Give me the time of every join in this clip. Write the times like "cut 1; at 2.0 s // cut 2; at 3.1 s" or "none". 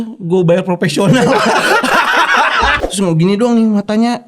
cut 1; at 2.8 s